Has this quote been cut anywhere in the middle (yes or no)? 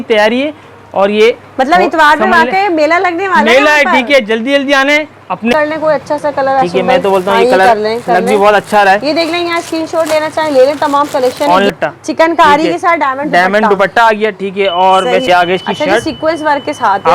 yes